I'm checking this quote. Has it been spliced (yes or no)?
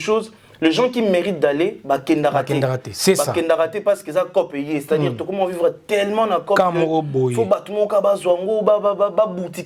no